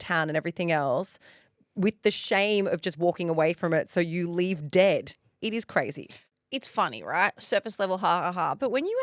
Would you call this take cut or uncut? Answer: uncut